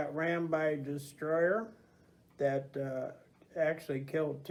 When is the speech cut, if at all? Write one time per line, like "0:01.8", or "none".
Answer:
none